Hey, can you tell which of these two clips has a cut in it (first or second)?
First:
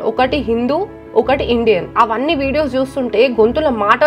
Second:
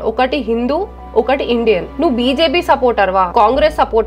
second